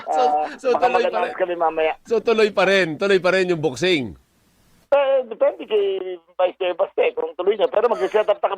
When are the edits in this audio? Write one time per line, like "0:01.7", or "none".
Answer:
0:02.1